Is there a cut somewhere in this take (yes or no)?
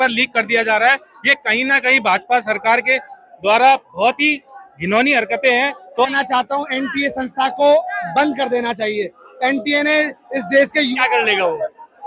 yes